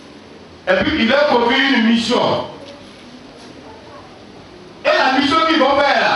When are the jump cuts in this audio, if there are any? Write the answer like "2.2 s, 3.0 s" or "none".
none